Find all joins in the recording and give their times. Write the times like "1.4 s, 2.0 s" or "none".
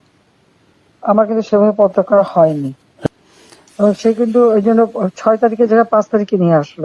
3.1 s